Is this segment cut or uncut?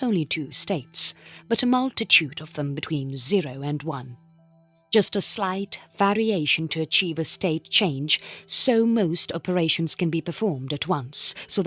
cut